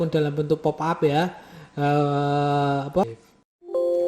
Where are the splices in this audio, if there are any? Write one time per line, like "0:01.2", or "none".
0:03.0